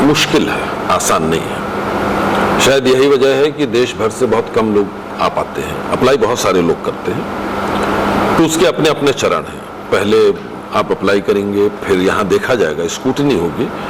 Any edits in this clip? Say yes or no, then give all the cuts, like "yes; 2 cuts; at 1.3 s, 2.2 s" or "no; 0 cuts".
no; 0 cuts